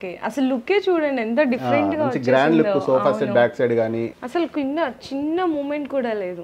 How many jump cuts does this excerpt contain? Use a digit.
1